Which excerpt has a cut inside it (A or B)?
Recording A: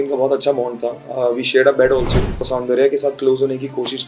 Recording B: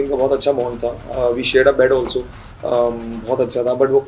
A